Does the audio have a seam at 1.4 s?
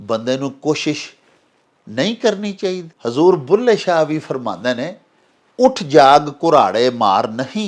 no; 1 cut; at 2.9 s

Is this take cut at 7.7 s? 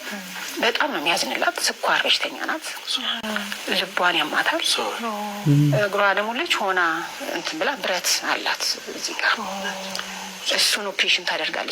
no; 1 cut; at 3.2 s

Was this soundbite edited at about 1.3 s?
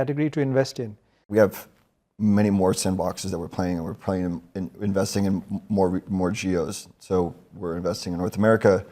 yes; 1 cut; at 1.3 s

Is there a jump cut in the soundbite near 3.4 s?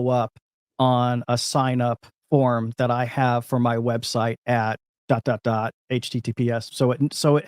no; 2 cuts; at 2.1 s, 4.9 s

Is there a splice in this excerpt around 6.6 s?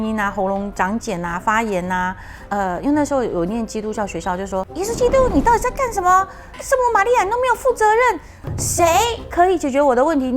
no; 2 cuts; at 4.7 s, 8.4 s

